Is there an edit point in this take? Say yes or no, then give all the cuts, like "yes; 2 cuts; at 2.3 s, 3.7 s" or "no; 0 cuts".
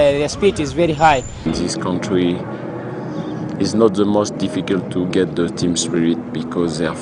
yes; 1 cut; at 1.5 s